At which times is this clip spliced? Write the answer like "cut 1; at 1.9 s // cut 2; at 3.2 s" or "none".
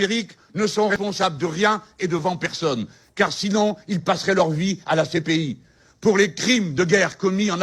cut 1; at 0.9 s